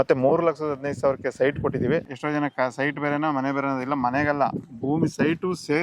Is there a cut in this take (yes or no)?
yes